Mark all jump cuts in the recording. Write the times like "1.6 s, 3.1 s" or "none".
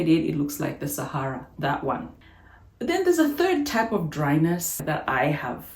2.3 s, 4.8 s